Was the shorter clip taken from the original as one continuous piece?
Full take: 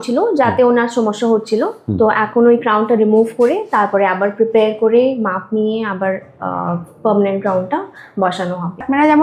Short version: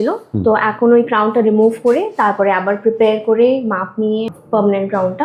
no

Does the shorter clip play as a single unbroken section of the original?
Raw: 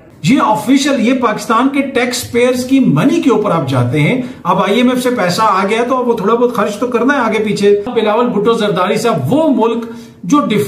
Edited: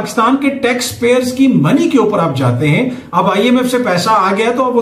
yes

